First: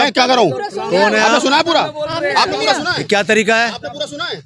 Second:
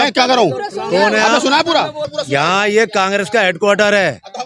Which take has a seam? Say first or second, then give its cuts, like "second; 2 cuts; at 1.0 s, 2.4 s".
second; 1 cut; at 2.0 s